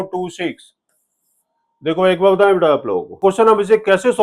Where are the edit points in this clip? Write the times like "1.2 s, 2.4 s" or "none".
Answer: 3.2 s